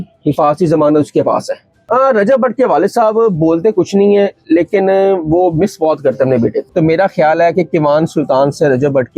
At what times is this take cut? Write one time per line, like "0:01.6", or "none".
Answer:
0:01.7
0:06.6